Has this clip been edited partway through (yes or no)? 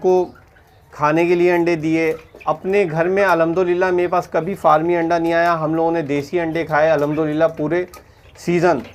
no